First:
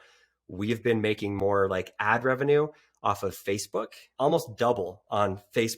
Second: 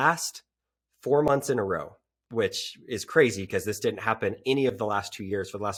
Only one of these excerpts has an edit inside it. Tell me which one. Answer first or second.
first